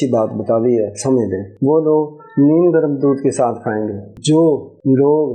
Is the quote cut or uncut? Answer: uncut